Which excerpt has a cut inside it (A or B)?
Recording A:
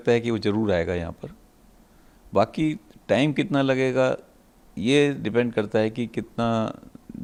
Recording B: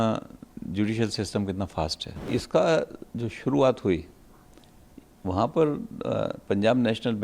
B